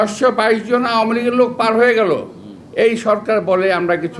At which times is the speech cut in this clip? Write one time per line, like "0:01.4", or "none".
none